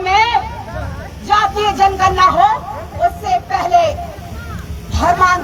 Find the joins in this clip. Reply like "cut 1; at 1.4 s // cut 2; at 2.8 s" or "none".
none